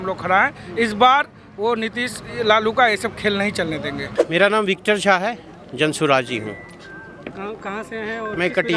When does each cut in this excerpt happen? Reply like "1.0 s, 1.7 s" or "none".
none